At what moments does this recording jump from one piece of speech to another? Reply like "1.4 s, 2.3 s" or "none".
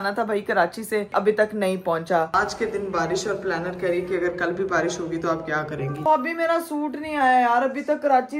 2.3 s, 6.0 s